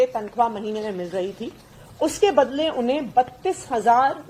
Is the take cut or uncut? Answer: uncut